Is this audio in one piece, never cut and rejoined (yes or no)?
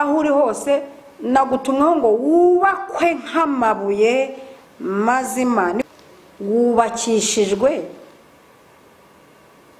no